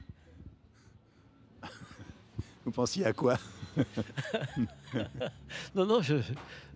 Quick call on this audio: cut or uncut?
uncut